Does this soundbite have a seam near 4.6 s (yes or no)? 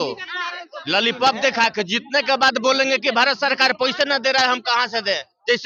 no